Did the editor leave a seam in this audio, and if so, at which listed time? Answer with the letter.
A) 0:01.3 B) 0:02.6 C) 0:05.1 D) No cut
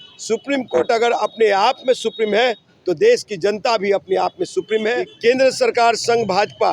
C